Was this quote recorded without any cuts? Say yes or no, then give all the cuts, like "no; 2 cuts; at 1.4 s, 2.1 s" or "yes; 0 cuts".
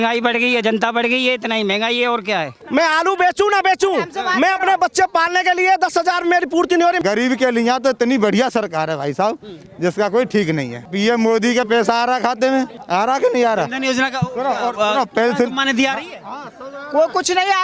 no; 4 cuts; at 2.6 s, 7.0 s, 10.8 s, 12.8 s